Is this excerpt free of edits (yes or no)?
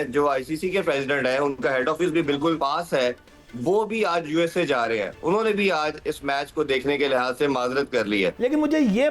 no